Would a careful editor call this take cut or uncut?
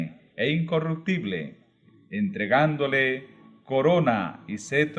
cut